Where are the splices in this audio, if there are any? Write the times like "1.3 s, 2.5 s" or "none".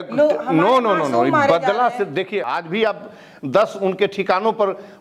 2.5 s

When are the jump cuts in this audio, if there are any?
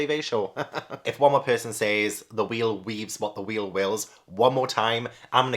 1.0 s

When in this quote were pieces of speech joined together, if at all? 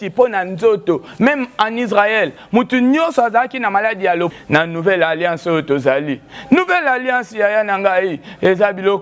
4.3 s

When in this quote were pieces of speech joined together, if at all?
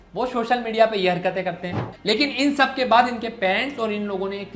1.9 s

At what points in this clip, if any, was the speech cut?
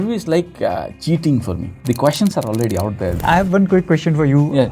0.9 s, 1.7 s, 3.2 s

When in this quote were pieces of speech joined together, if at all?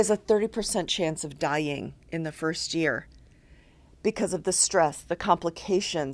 none

